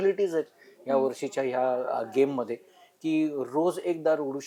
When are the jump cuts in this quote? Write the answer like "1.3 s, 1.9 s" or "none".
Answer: none